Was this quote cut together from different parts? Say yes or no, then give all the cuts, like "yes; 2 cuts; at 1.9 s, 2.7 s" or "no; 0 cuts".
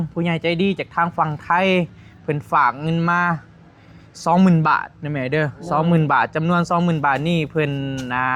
no; 0 cuts